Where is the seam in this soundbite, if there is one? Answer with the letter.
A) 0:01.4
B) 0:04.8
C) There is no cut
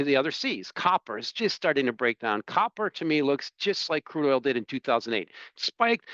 C